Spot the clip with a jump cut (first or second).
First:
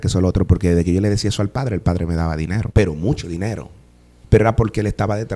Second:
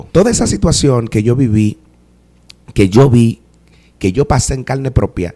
first